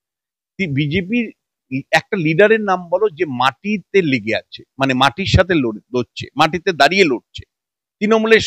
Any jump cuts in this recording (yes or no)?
no